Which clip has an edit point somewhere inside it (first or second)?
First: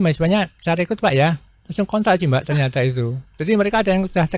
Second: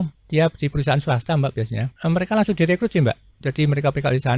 second